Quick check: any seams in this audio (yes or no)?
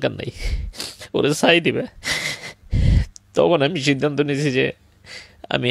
no